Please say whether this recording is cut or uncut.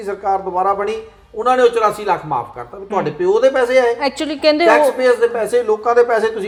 uncut